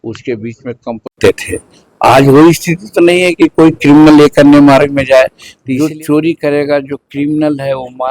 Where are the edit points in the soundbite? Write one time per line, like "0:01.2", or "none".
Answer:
0:05.8